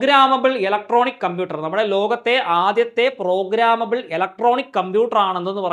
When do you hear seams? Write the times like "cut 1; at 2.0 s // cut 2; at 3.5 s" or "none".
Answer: none